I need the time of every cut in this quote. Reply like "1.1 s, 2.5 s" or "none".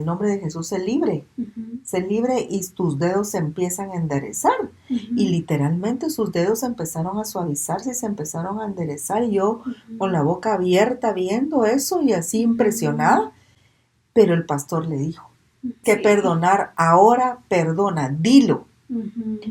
15.8 s